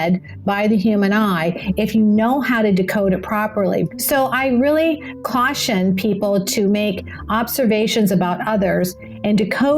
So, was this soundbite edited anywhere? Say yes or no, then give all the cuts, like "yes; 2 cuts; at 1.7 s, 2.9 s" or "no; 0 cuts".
yes; 1 cut; at 3.9 s